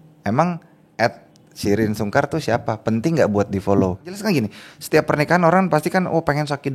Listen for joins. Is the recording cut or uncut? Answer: cut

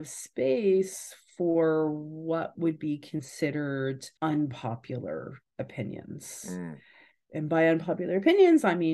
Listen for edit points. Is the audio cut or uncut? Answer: uncut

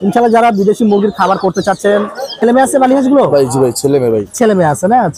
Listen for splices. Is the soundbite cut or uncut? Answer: cut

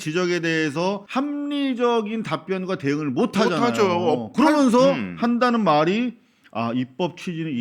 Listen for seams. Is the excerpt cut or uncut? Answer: cut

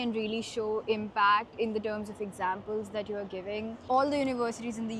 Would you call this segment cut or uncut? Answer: cut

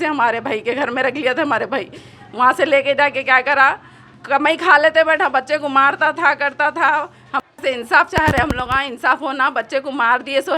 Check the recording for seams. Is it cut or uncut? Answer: cut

